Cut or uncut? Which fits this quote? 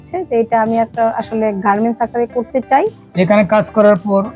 cut